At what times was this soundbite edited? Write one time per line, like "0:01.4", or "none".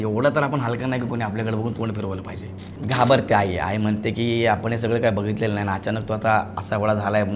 0:02.8

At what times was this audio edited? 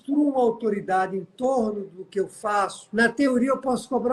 0:02.8

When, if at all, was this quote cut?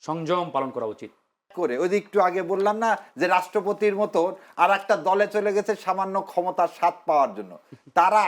0:01.5

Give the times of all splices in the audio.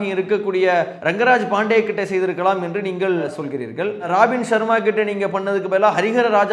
0:01.0

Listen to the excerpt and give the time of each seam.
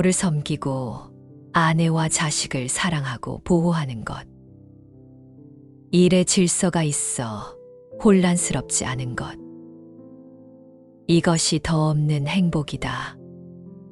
0:04.3
0:05.9
0:09.3
0:11.0

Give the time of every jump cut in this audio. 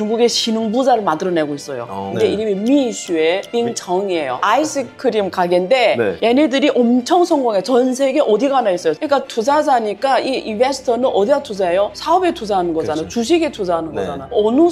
0:02.2
0:04.4
0:09.0

